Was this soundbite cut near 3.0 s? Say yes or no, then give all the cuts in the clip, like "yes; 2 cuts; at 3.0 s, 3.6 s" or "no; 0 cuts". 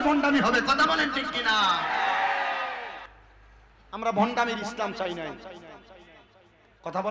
no; 0 cuts